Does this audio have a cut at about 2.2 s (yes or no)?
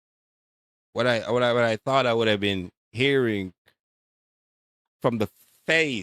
no